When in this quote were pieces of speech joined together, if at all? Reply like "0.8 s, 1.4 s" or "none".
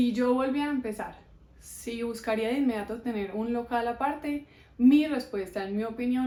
none

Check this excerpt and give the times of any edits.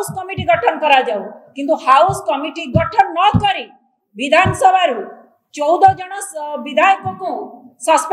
none

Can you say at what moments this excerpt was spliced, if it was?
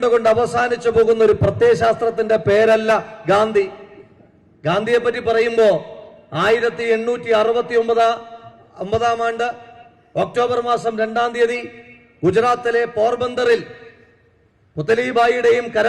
none

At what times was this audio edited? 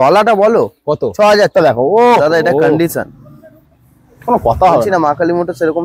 1.5 s

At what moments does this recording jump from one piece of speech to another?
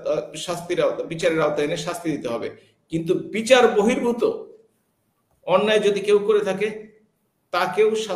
none

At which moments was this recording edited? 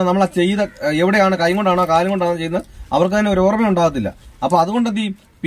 none

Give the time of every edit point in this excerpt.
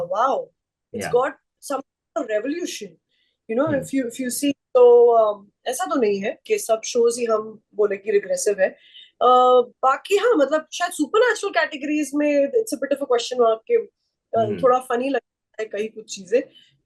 none

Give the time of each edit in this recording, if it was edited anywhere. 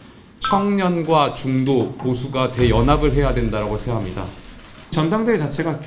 4.9 s

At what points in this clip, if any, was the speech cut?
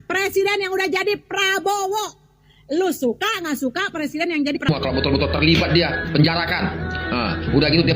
4.7 s

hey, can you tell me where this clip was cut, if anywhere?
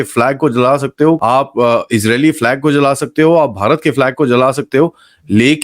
1.2 s

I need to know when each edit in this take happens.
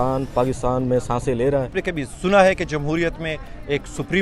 1.8 s

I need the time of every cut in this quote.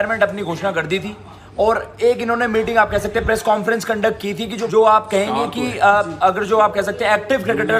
4.5 s

